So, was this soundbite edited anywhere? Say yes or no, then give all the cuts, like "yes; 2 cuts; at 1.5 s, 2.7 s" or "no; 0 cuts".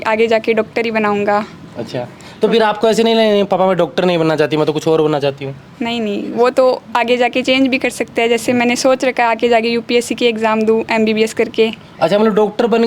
no; 0 cuts